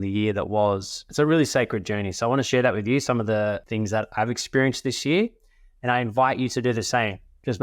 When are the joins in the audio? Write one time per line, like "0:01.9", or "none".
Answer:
0:01.0
0:02.5